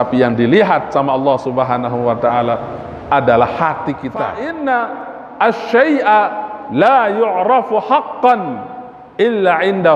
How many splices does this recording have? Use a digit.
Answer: 1